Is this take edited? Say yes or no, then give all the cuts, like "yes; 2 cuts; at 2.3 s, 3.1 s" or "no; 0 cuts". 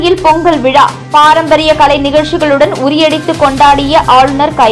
no; 0 cuts